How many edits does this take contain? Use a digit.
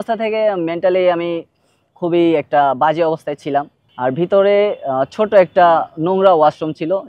1